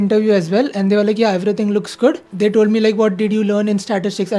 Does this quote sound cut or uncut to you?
cut